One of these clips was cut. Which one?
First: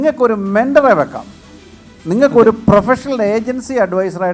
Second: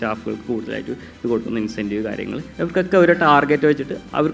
second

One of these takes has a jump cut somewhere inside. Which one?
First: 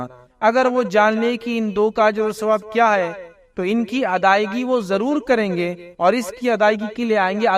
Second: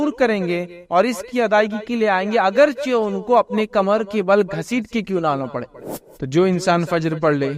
second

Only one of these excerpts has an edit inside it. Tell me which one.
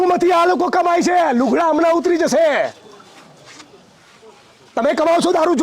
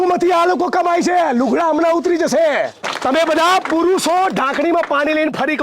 second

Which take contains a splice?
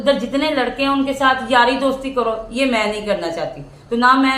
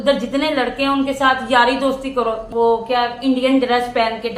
second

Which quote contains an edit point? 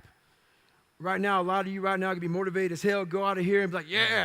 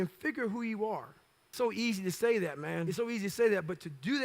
second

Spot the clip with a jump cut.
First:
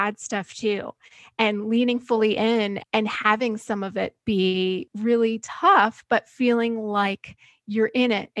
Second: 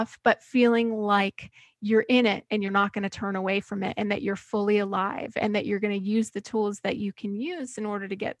first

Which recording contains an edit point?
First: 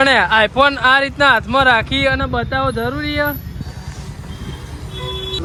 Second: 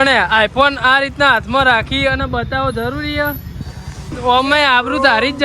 second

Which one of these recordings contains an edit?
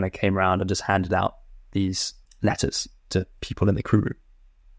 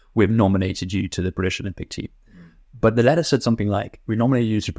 first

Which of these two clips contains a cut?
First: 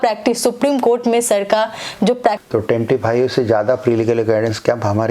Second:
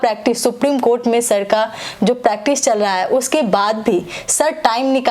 first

